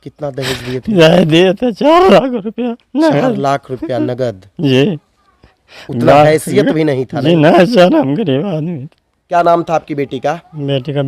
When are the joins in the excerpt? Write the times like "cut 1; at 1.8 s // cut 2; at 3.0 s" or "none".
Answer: cut 1; at 9.2 s